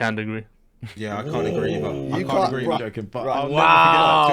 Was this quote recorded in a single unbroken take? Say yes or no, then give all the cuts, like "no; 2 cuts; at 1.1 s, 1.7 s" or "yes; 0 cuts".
no; 1 cut; at 2.8 s